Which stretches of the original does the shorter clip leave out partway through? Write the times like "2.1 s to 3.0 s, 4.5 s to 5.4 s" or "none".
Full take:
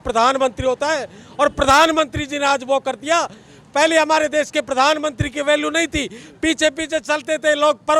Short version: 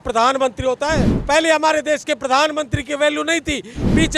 1.1 s to 3.6 s